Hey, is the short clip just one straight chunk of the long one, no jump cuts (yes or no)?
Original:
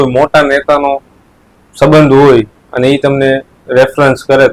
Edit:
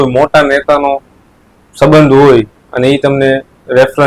yes